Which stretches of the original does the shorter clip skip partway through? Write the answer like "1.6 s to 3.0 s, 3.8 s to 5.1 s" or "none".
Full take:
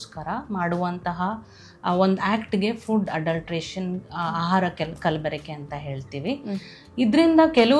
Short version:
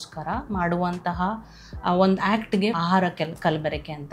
2.8 s to 4.4 s